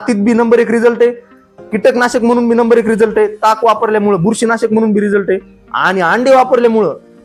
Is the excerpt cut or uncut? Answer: uncut